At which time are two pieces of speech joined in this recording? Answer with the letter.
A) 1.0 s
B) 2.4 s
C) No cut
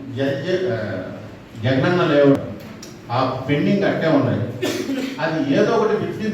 B